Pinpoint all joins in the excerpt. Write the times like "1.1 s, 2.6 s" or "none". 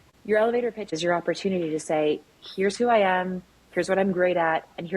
0.9 s